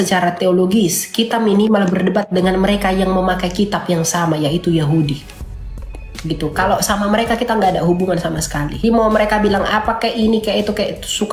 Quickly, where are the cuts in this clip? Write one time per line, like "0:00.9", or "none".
0:08.8